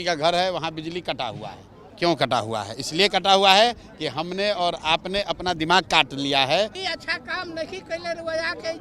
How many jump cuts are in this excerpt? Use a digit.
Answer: 2